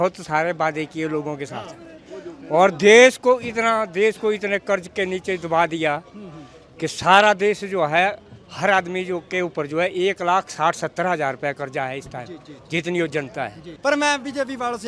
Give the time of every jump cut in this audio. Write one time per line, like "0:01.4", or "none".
0:13.7